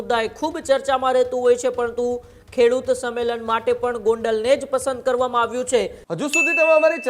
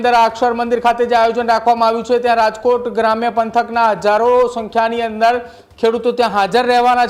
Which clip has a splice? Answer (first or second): first